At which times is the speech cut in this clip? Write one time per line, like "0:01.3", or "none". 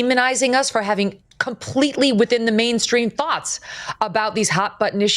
none